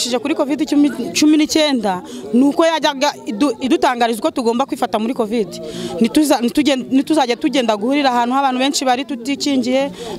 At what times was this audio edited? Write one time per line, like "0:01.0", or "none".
none

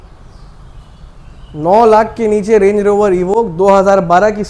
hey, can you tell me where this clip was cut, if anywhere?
none

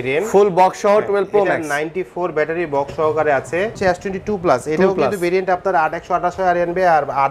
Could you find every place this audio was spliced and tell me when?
0:03.8

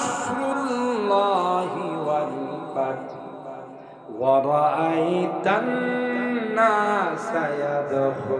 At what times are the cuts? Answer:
none

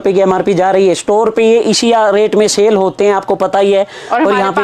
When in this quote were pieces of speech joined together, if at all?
none

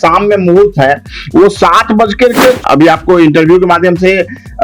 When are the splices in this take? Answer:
0:02.6

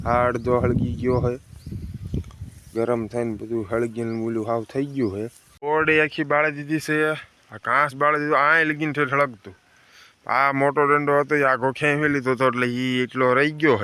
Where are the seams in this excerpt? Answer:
0:05.7

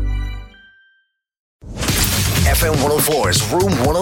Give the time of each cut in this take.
0:01.6

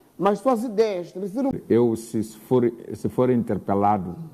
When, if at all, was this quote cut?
0:01.5

